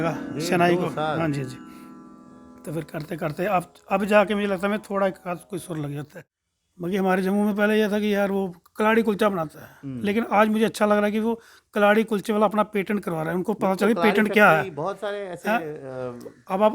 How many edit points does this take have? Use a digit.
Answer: 1